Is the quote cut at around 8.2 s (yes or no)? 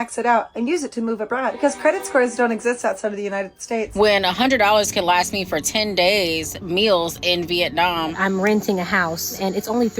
yes